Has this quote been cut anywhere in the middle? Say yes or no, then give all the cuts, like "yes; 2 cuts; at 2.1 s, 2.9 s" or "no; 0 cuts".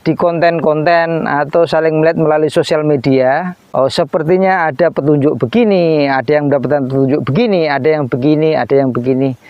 yes; 1 cut; at 3.6 s